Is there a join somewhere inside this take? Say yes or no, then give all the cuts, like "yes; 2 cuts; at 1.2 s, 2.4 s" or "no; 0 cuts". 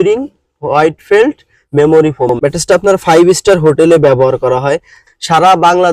yes; 2 cuts; at 2.3 s, 5.0 s